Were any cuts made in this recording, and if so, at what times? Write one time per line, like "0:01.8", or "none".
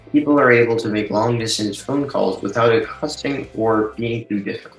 none